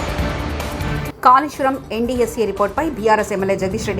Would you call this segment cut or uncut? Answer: cut